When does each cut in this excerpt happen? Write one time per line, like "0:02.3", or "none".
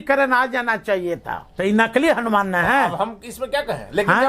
0:01.4